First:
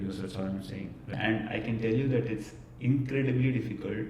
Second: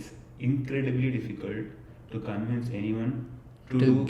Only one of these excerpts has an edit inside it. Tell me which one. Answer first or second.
first